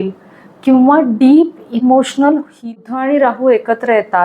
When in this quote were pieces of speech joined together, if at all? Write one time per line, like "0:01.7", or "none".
0:02.6